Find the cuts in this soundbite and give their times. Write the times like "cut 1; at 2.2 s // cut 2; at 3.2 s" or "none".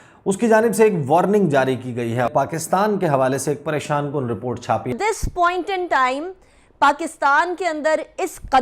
cut 1; at 2.3 s // cut 2; at 4.9 s